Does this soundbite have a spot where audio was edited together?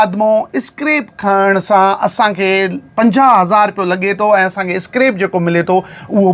no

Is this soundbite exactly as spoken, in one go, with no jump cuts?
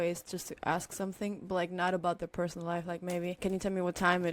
no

